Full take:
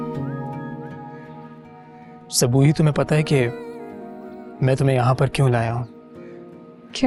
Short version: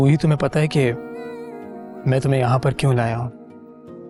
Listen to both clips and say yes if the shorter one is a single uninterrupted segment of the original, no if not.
yes